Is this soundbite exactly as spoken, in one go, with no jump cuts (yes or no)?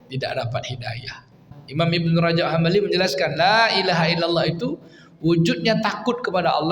no